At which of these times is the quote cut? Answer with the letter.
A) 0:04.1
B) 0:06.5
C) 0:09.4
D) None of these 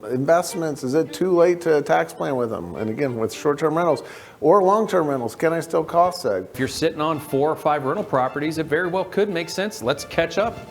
B